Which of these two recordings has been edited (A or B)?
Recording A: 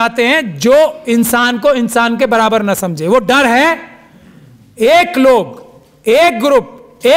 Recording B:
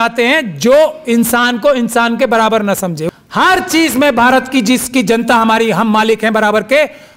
B